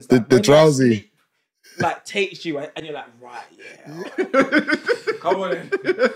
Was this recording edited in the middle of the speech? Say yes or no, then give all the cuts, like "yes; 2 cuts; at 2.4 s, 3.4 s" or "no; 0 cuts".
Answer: no; 0 cuts